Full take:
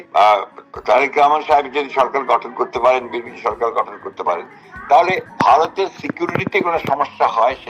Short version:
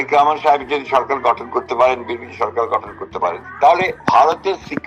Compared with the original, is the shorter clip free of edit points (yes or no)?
no